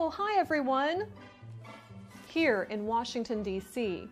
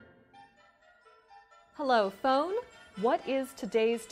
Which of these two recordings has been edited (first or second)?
second